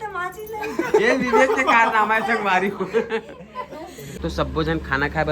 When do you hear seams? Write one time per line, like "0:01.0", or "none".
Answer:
0:04.1